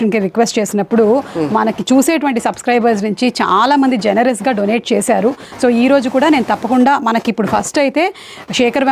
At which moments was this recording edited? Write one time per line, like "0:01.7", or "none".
none